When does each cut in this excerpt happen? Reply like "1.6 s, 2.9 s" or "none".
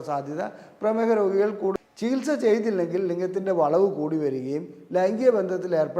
1.7 s

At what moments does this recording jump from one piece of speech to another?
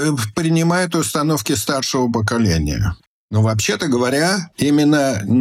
3.0 s

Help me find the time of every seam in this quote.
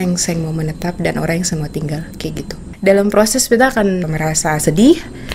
2.6 s, 4.0 s

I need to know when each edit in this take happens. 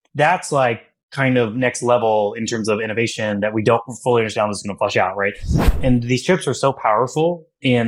5.7 s

